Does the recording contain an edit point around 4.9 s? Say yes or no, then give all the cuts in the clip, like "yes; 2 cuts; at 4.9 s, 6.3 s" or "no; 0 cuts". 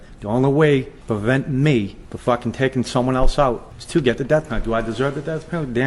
no; 3 cuts; at 1.0 s, 2.0 s, 3.7 s